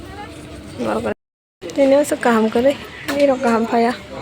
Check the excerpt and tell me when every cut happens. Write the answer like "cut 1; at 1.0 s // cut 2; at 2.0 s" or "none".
cut 1; at 1.2 s